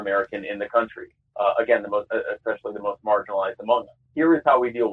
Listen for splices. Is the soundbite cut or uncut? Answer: cut